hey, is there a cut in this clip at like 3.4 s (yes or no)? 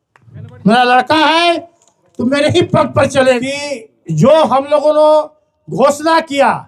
yes